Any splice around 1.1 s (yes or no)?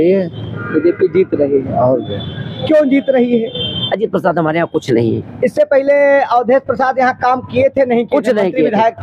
no